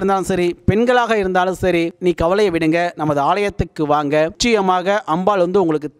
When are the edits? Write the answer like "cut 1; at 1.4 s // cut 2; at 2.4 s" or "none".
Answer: cut 1; at 1.9 s // cut 2; at 4.4 s